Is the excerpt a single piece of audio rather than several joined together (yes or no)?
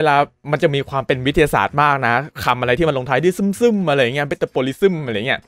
yes